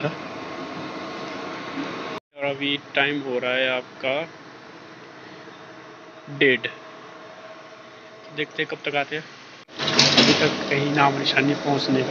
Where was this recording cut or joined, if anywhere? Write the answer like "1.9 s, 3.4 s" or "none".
2.4 s, 9.8 s